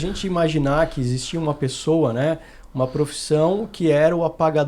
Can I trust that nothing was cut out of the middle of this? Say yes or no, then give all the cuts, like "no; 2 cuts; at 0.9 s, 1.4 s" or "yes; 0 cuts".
yes; 0 cuts